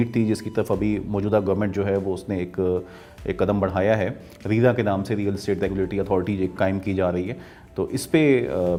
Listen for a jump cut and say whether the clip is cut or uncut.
uncut